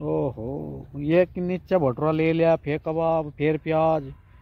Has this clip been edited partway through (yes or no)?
no